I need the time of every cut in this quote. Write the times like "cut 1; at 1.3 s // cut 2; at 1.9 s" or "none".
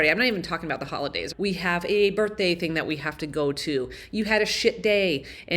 cut 1; at 1.2 s